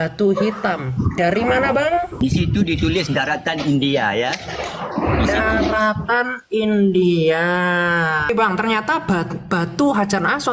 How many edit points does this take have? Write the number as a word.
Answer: two